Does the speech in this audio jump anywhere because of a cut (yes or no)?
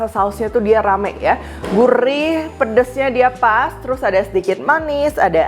no